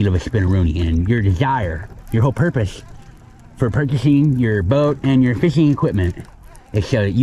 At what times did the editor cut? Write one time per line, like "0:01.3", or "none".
none